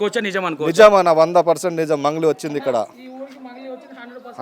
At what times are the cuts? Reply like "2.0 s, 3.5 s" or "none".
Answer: none